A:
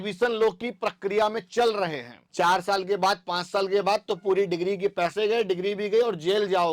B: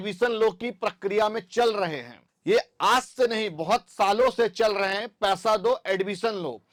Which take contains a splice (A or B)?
A